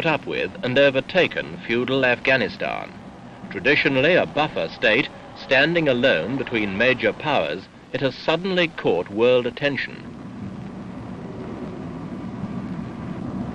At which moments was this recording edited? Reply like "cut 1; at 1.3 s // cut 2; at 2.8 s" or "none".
cut 1; at 2.9 s